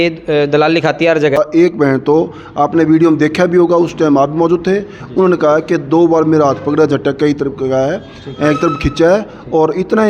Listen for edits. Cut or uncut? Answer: cut